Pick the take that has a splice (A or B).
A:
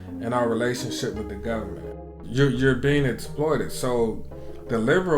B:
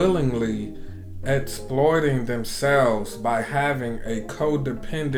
A